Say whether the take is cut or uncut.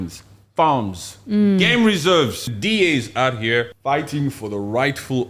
cut